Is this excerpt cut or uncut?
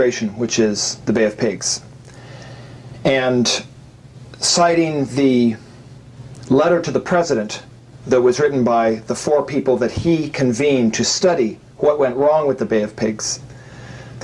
cut